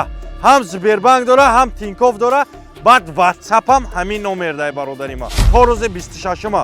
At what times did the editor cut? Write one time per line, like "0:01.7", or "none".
0:05.4

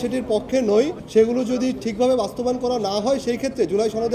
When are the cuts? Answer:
0:01.0

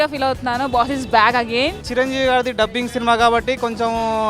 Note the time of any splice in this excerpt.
0:01.8

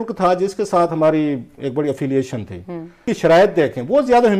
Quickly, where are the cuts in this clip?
0:03.1

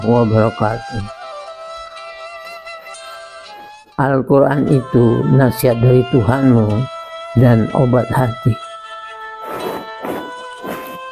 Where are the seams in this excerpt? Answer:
none

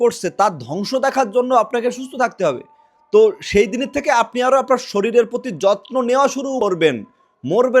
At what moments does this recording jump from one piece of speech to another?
0:06.6

